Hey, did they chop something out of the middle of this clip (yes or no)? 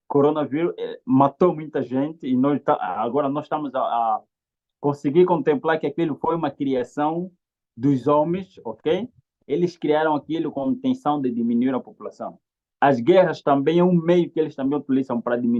no